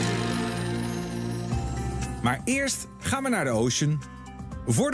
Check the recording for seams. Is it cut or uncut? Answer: uncut